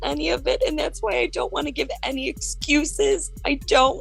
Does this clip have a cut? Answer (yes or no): no